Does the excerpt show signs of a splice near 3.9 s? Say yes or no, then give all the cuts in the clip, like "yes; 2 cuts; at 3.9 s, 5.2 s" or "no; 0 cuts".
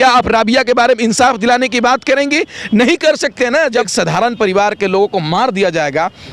yes; 1 cut; at 3.9 s